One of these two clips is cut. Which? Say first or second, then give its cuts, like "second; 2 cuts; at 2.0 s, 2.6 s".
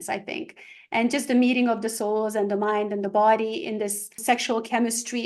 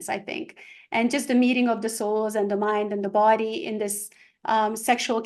first; 1 cut; at 4.2 s